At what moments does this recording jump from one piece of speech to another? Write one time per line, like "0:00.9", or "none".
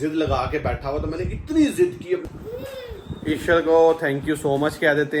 0:02.3

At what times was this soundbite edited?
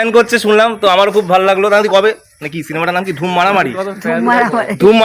none

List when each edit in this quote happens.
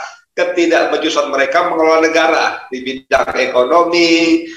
none

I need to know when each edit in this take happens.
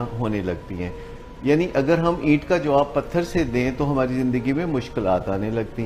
none

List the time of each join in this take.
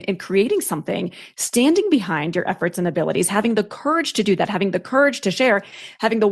none

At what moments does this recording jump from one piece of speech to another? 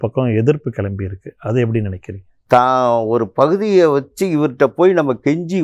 0:02.3

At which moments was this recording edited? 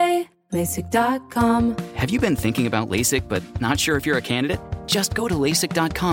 0:01.7

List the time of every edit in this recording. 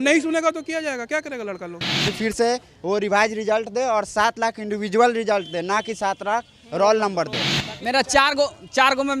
0:02.0
0:07.7

